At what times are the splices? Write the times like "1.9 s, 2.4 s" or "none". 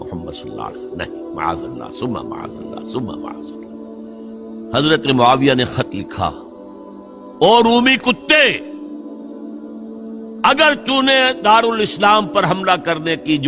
4.7 s